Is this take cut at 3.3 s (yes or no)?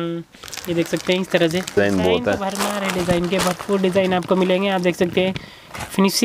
no